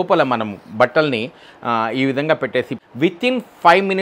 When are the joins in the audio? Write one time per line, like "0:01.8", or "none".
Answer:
0:02.8